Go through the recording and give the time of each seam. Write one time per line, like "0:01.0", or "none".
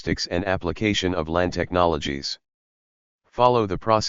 0:01.1